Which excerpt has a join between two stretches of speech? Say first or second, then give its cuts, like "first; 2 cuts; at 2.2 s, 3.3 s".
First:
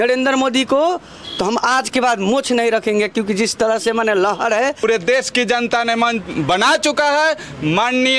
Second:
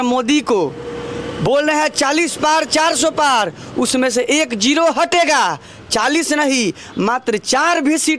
first; 1 cut; at 4.8 s